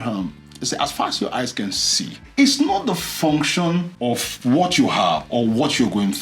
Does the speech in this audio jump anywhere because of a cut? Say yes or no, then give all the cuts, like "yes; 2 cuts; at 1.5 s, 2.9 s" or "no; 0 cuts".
yes; 2 cuts; at 2.2 s, 3.9 s